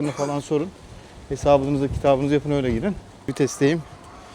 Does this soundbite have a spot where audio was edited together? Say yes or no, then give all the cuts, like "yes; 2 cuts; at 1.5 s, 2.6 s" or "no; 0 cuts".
yes; 1 cut; at 3.3 s